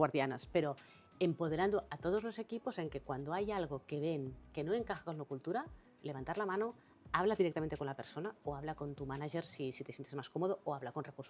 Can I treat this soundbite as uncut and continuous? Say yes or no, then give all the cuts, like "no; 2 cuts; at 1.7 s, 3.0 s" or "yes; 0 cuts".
yes; 0 cuts